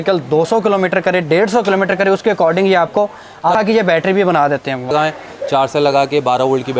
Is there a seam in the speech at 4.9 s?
yes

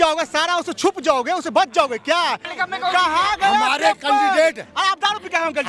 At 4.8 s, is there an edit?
no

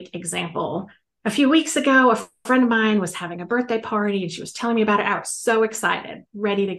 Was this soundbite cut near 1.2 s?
yes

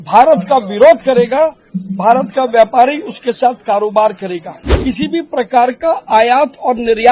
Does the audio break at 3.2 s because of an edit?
no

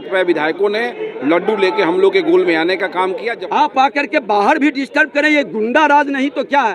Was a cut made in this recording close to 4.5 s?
no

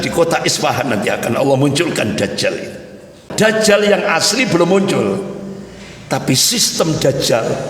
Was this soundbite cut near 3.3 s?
yes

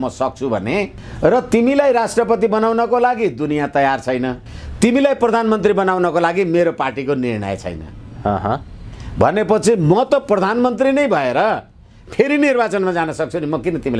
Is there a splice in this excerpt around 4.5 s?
yes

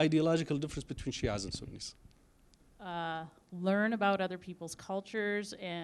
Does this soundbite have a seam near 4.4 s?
no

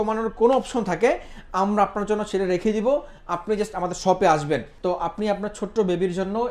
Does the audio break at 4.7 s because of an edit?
yes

